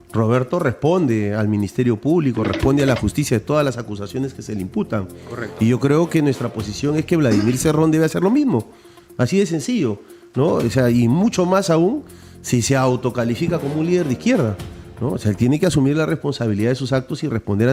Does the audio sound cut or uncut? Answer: uncut